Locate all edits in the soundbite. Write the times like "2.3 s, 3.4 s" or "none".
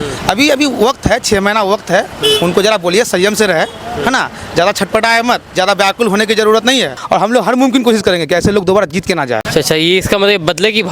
7.0 s, 9.4 s

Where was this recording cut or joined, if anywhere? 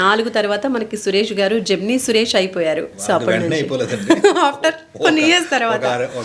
2.9 s

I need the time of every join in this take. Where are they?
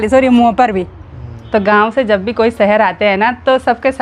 1.3 s

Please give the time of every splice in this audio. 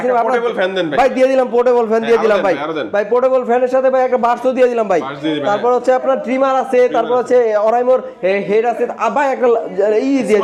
none

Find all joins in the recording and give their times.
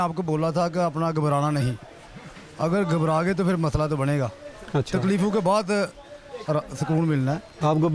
none

